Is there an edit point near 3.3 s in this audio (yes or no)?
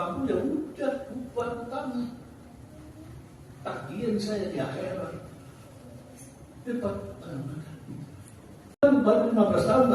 no